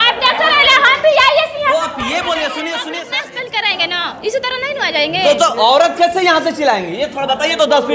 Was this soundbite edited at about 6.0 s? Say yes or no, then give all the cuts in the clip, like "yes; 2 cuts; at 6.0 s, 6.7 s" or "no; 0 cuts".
no; 1 cut; at 3.0 s